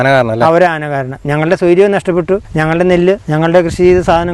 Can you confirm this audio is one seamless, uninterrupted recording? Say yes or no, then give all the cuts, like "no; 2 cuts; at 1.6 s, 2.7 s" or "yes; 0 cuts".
no; 2 cuts; at 2.5 s, 3.2 s